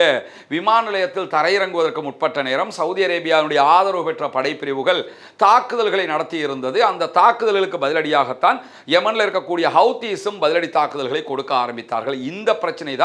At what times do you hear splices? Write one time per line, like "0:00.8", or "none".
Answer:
none